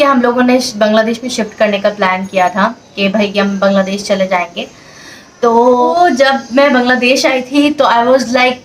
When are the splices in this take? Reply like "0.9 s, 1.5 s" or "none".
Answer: 5.9 s